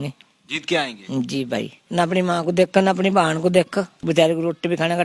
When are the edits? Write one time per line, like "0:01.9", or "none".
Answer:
0:01.8
0:04.0